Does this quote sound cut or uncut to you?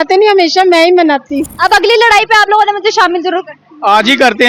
cut